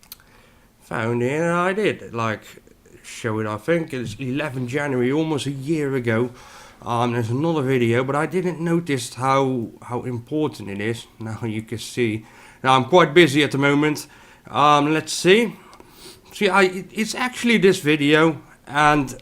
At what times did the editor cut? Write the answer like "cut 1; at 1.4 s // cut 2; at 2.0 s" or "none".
cut 1; at 18.0 s

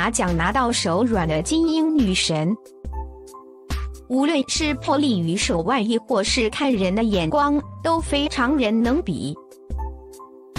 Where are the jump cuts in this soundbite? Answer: cut 1; at 2.6 s // cut 2; at 4.0 s

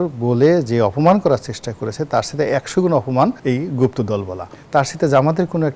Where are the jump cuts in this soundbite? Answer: cut 1; at 4.5 s

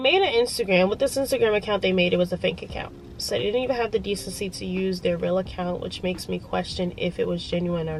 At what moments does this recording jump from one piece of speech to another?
none

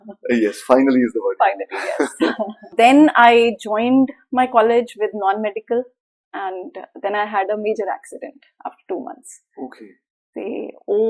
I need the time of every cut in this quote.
cut 1; at 2.7 s

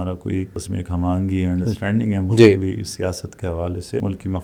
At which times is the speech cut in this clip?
none

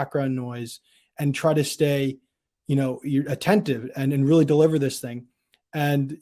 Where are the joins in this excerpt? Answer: none

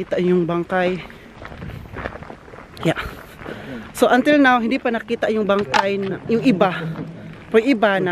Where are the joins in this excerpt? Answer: none

